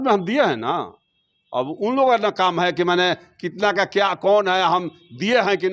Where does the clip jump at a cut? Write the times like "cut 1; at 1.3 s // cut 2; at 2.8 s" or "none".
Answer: none